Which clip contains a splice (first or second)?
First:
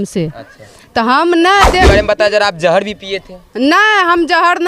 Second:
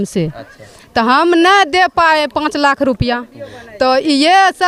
first